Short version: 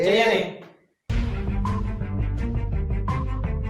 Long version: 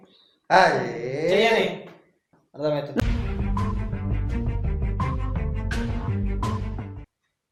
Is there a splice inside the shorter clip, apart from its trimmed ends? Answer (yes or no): yes